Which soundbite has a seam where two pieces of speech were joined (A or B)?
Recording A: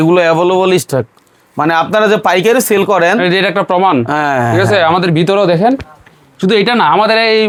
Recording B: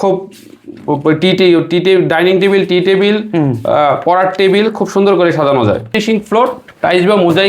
B